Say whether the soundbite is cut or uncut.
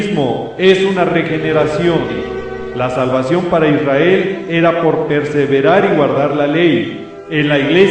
uncut